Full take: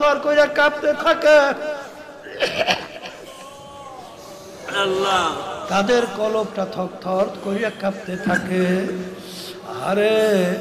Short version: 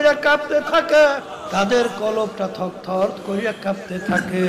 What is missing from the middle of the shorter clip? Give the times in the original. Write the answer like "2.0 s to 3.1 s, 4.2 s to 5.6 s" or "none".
1.6 s to 5.5 s